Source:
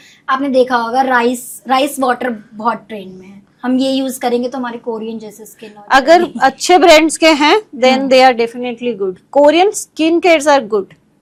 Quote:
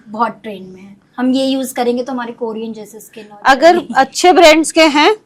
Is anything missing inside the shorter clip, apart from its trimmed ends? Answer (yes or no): no